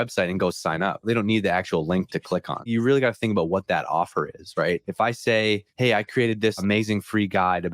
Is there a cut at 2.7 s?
yes; 5 cuts; at 1.0 s, 2.7 s, 4.9 s, 5.7 s, 6.6 s

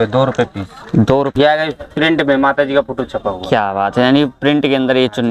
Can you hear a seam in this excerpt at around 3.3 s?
no; 1 cut; at 1.4 s

